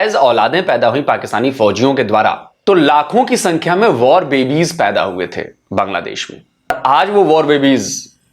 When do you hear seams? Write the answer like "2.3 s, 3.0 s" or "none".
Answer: 2.5 s, 6.7 s